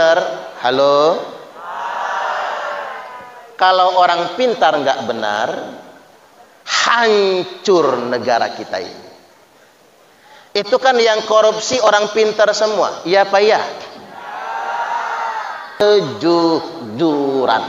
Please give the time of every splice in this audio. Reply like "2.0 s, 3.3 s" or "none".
15.8 s